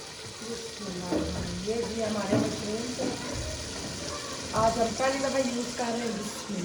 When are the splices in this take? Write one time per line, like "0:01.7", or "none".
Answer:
none